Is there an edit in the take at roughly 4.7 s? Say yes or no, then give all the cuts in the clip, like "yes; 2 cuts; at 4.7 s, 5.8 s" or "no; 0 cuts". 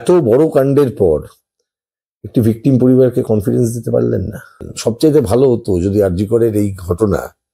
yes; 1 cut; at 4.7 s